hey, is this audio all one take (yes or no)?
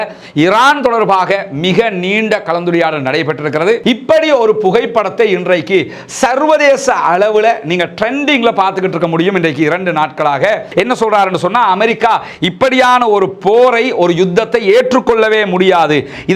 no